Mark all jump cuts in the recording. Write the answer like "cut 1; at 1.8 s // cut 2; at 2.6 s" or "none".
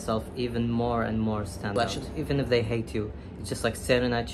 cut 1; at 1.8 s